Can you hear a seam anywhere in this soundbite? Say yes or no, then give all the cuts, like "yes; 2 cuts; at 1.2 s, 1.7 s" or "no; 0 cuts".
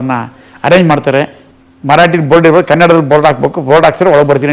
yes; 1 cut; at 1.4 s